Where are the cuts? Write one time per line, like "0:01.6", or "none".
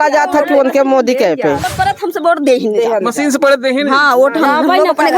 0:01.7